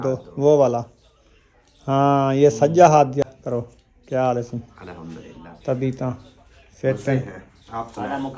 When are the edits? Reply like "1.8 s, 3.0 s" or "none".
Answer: none